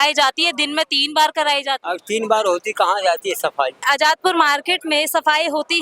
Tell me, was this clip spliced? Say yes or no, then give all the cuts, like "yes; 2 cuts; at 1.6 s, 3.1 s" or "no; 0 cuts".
yes; 2 cuts; at 1.8 s, 3.8 s